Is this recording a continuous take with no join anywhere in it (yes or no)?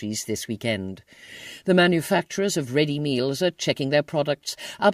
no